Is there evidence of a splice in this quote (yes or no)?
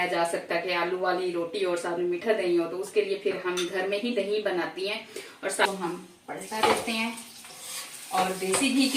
yes